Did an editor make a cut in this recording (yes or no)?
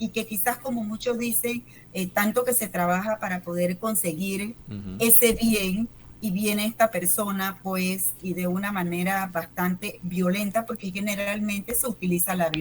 yes